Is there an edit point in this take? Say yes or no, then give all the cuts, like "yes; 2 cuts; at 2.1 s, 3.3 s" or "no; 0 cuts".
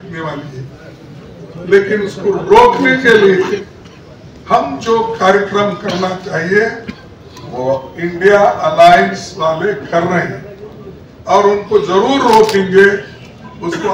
no; 0 cuts